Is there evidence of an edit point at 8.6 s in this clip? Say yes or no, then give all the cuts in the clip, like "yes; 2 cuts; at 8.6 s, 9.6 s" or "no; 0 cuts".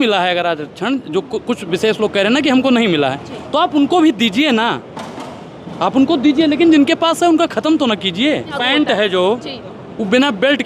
yes; 1 cut; at 8.6 s